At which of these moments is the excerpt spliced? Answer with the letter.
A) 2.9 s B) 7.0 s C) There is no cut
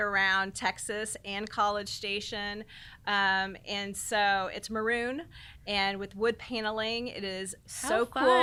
C